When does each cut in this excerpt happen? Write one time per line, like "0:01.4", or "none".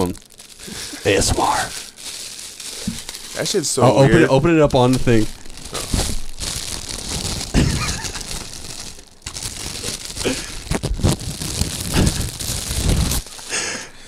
none

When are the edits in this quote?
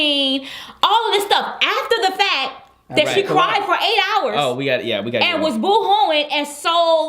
0:04.1

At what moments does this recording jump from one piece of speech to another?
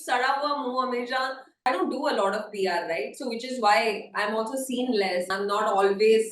0:01.7
0:05.3

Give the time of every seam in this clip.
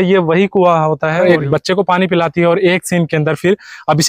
0:01.2

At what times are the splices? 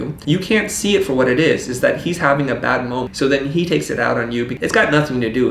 0:03.1
0:04.5

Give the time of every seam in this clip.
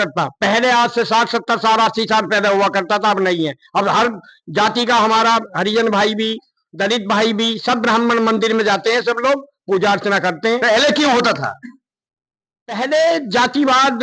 none

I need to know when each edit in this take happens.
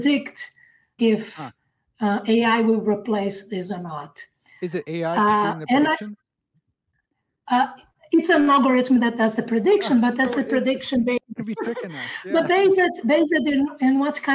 0:00.9

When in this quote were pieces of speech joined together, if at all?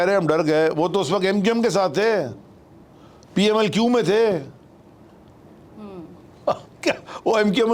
none

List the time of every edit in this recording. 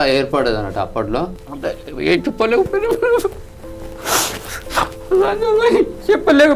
0:01.4

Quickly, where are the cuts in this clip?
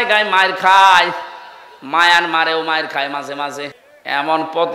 0:03.8

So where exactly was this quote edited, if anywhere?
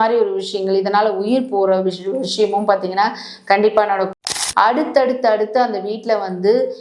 0:04.2

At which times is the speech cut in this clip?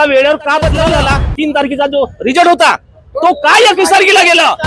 0:01.0

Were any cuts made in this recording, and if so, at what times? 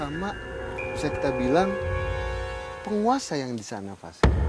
none

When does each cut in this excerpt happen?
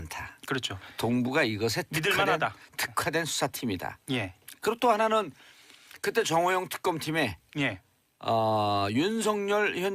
0:04.7

